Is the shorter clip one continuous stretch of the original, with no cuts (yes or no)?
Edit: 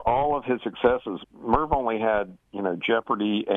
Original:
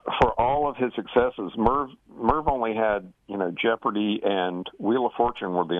no